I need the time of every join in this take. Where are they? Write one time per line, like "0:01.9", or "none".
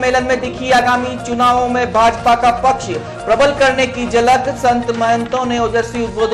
none